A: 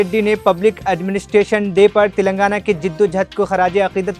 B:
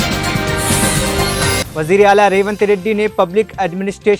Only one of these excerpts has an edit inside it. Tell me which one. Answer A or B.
B